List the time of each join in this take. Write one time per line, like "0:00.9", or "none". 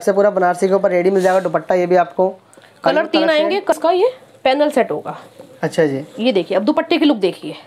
0:03.8